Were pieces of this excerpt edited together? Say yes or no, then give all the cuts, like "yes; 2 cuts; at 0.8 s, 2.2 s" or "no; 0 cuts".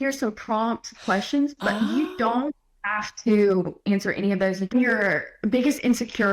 yes; 1 cut; at 4.7 s